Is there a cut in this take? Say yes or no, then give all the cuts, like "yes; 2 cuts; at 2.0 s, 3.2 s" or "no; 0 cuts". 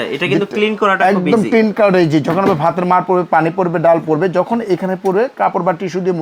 no; 0 cuts